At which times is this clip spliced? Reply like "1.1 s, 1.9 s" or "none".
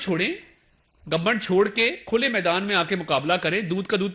none